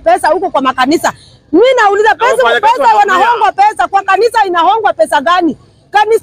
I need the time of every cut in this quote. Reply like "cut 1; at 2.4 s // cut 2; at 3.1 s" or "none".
none